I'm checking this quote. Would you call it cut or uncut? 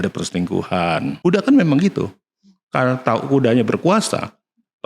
cut